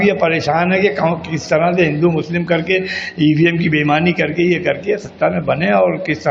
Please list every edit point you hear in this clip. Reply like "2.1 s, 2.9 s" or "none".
none